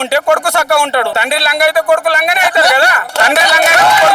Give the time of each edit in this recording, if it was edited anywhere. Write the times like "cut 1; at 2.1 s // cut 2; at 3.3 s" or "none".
cut 1; at 1.1 s // cut 2; at 3.1 s